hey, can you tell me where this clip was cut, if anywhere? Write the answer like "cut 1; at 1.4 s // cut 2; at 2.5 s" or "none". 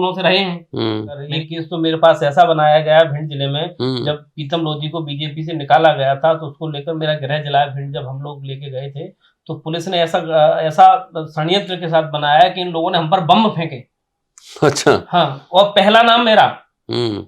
cut 1; at 1.3 s

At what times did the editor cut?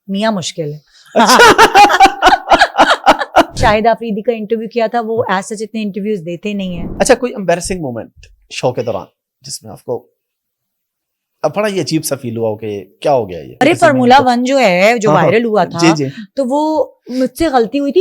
cut 1; at 3.6 s // cut 2; at 6.8 s // cut 3; at 13.6 s

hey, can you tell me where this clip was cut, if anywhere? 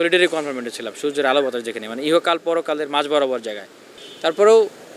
none

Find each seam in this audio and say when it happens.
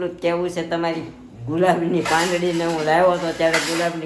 none

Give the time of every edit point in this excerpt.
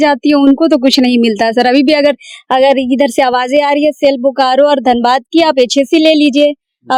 none

